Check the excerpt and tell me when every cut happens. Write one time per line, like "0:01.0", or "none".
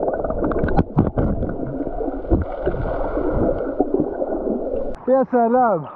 none